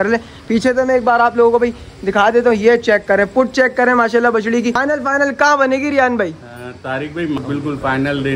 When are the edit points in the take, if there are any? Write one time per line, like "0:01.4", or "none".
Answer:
0:04.8
0:07.4